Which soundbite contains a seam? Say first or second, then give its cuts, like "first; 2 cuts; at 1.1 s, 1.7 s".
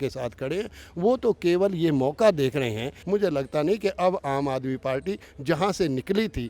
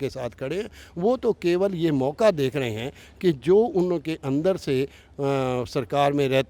first; 1 cut; at 2.9 s